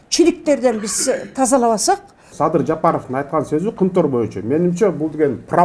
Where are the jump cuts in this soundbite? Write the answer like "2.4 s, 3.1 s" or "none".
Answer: 2.3 s